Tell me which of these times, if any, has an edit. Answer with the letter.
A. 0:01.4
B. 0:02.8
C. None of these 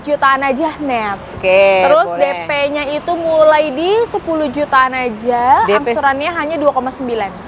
A